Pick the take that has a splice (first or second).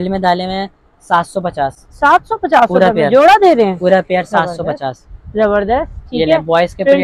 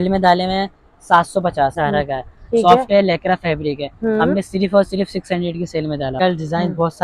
second